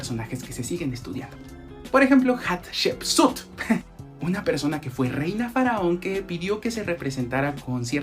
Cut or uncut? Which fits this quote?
cut